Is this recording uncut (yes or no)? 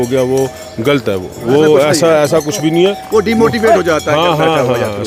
yes